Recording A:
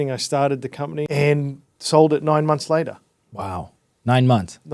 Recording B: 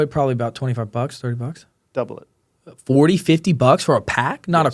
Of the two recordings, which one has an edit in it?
A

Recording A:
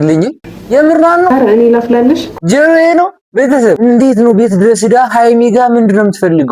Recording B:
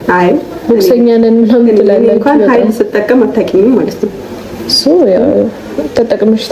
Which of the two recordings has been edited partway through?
A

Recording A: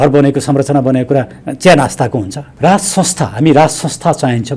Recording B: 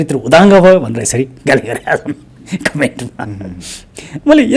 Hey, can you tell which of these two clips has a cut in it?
A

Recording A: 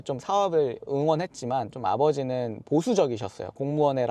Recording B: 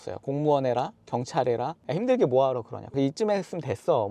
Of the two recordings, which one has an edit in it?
B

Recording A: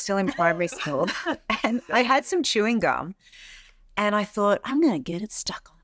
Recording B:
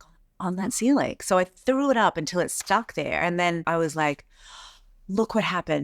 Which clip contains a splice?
B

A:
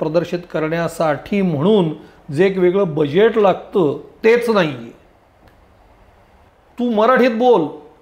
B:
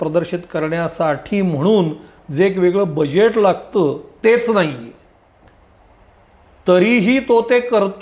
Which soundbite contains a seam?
A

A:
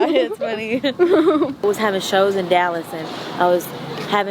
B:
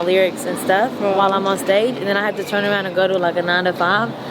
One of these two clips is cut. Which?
A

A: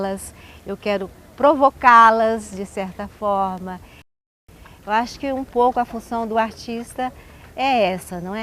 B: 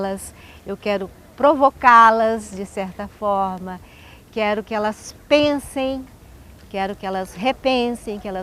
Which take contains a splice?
A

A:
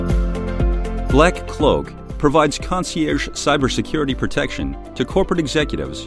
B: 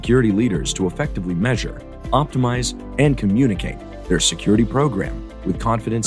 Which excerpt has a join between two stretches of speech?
A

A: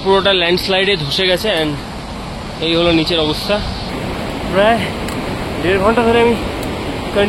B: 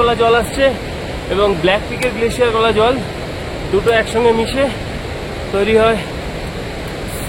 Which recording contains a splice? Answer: A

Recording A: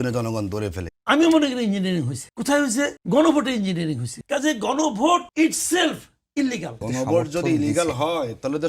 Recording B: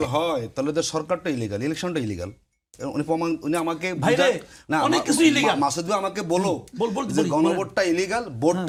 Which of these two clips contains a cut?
A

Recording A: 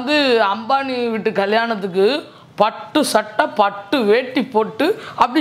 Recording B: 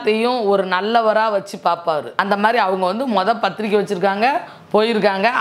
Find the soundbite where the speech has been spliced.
B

